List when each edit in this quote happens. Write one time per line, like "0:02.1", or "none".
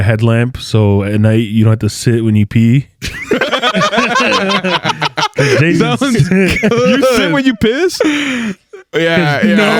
none